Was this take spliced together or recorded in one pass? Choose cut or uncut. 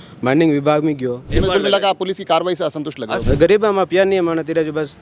cut